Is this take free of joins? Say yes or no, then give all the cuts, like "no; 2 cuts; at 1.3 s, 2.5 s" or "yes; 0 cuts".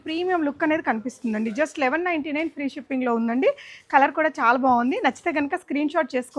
yes; 0 cuts